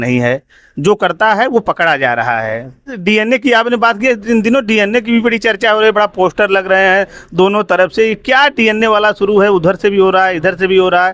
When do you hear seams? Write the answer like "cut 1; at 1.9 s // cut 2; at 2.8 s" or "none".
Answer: cut 1; at 3.0 s

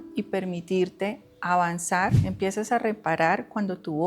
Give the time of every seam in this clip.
cut 1; at 2.2 s

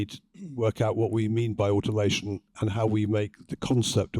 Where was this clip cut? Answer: cut 1; at 2.5 s

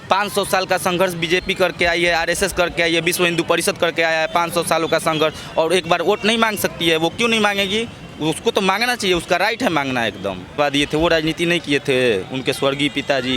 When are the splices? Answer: cut 1; at 10.4 s

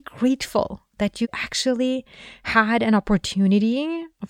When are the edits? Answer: cut 1; at 1.3 s

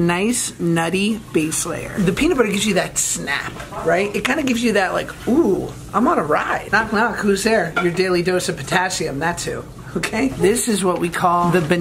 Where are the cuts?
none

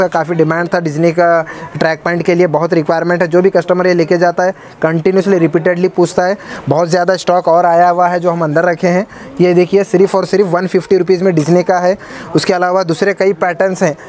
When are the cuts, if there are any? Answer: none

